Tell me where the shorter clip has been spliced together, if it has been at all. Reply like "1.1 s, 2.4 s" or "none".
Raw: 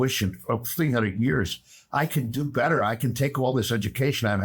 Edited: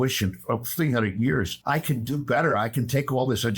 1.5 s